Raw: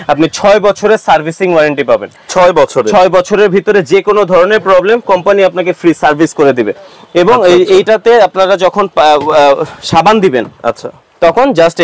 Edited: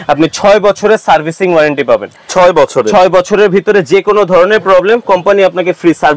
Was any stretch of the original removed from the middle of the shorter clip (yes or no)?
no